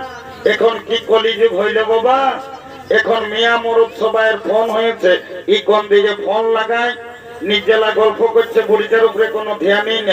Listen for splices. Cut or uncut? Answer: uncut